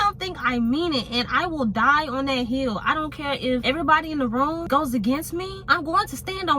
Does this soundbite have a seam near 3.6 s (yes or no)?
yes